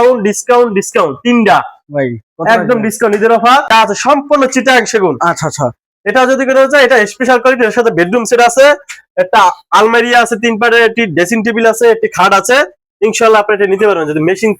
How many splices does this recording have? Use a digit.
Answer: 1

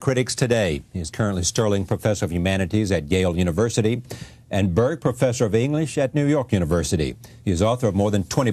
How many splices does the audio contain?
0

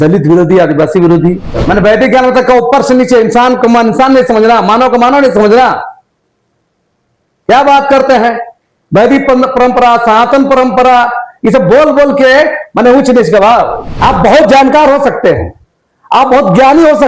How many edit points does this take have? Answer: 2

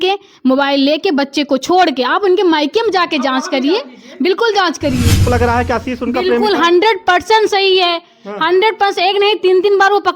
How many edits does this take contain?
1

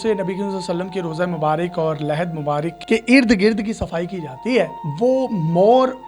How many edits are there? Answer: 0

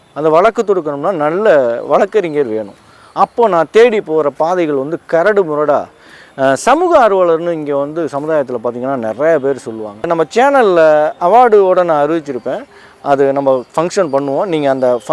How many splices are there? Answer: 1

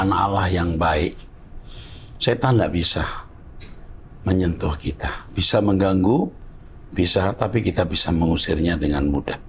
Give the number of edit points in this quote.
0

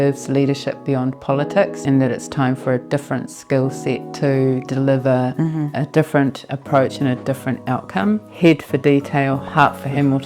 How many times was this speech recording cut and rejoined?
2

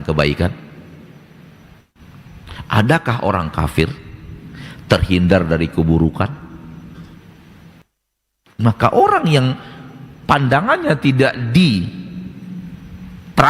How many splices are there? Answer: 2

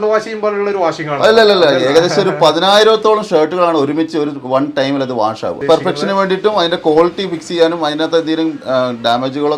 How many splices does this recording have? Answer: 1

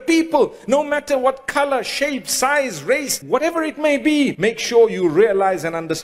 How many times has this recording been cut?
2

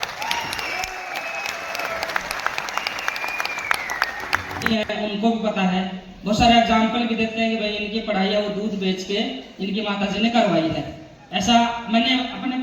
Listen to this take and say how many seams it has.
1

